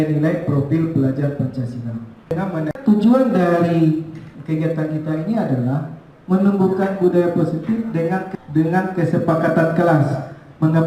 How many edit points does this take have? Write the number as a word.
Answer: two